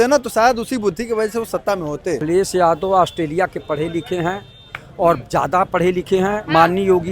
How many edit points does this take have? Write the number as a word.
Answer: one